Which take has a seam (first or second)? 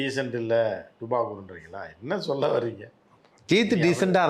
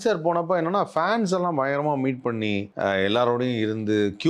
second